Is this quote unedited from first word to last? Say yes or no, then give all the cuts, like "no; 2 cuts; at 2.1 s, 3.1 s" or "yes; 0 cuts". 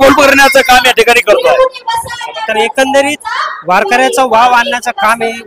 yes; 0 cuts